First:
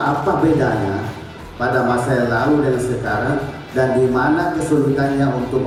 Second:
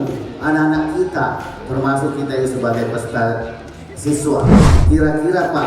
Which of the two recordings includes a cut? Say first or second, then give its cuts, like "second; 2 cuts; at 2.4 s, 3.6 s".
second; 1 cut; at 4.7 s